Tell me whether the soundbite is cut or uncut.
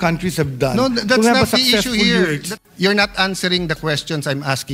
cut